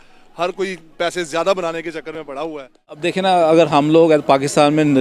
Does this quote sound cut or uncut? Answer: cut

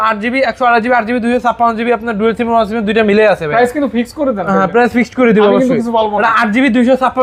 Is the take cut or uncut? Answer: uncut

